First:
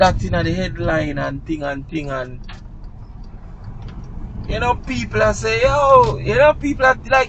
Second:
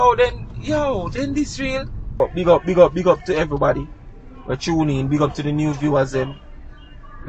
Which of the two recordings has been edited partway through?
second; 1 cut; at 2.2 s

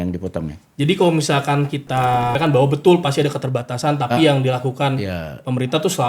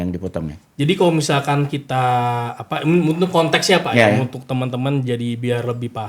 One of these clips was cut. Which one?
first; 1 cut; at 2.4 s

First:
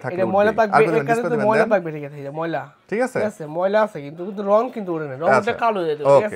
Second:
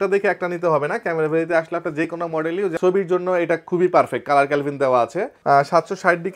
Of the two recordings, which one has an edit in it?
second; 2 cuts; at 2.8 s, 5.4 s

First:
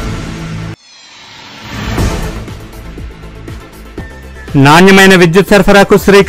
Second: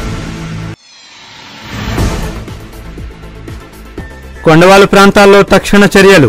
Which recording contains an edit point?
first; 1 cut; at 4.3 s

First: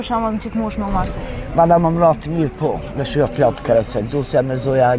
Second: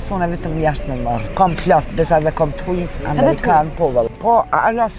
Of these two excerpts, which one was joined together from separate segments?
second; 2 cuts; at 1.2 s, 4.1 s

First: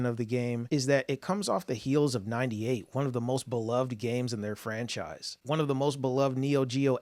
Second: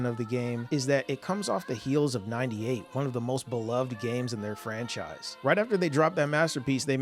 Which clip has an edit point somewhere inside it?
second; 1 cut; at 5.3 s

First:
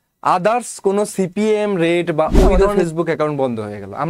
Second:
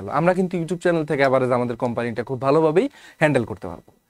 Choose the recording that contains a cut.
first; 1 cut; at 2.7 s

